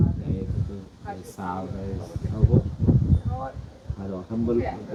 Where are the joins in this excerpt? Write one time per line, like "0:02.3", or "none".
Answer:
none

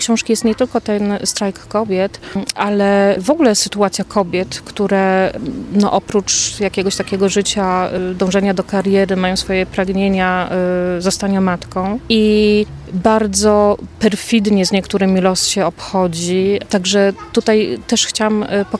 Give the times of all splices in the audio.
0:03.2
0:05.3
0:08.0
0:12.0
0:12.8
0:13.9
0:16.6

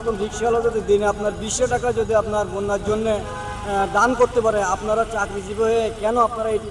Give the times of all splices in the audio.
none

